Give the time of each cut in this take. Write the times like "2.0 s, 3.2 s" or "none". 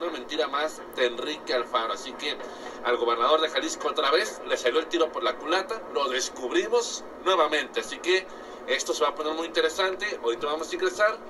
none